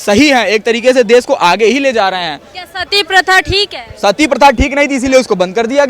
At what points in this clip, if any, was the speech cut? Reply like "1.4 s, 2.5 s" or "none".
none